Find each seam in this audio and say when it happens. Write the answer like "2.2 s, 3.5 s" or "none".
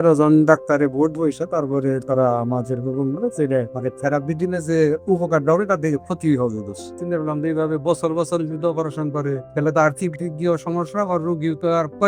3.7 s, 7.0 s, 9.4 s